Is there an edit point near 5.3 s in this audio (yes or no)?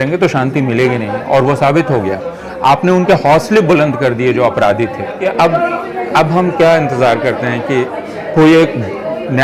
yes